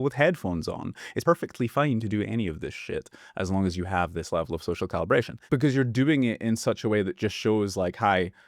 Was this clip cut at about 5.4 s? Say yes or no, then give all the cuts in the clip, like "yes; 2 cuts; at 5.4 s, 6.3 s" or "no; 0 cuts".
yes; 2 cuts; at 1.2 s, 5.4 s